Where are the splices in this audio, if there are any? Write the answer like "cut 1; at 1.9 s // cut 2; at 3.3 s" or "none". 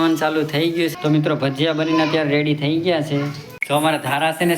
cut 1; at 0.9 s // cut 2; at 3.5 s